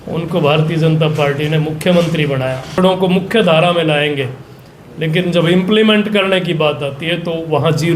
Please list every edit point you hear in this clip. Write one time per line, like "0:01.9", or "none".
0:02.7